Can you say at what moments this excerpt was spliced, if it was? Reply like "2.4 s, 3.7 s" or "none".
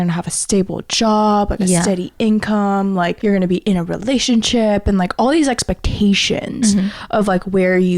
3.2 s